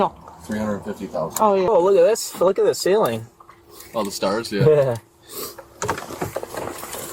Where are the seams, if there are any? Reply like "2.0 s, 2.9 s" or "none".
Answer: 1.7 s